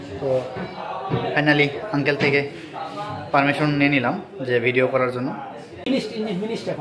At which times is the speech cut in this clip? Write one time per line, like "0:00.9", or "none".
0:05.9